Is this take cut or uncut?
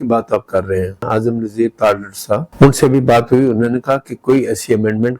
cut